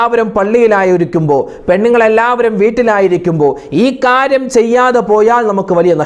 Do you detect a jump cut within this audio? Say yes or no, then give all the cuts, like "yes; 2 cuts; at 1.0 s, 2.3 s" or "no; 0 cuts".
no; 0 cuts